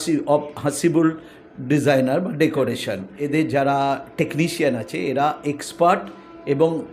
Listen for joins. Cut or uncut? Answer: cut